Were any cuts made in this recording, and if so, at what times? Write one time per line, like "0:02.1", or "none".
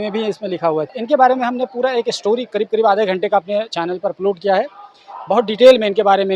0:00.9